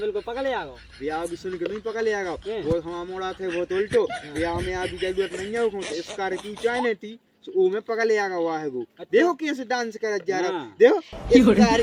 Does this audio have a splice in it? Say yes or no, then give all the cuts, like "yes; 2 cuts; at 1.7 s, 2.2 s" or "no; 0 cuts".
no; 0 cuts